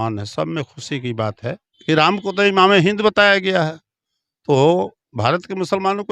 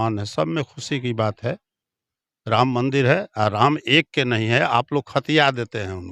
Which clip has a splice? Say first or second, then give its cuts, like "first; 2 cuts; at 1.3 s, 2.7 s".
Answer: first; 1 cut; at 1.7 s